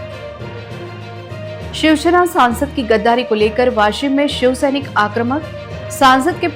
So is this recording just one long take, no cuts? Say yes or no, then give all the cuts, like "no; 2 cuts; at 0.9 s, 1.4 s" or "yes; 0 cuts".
yes; 0 cuts